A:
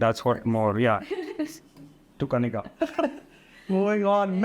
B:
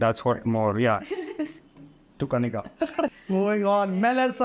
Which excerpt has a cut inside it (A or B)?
B